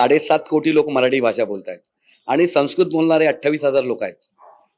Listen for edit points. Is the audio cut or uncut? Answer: uncut